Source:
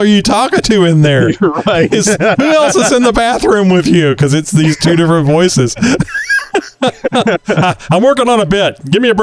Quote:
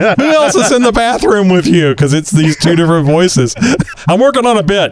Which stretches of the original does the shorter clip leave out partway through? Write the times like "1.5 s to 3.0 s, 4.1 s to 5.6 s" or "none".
6.2 s to 7.8 s